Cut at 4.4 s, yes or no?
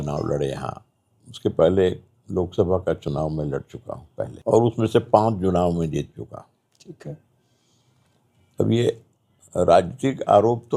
yes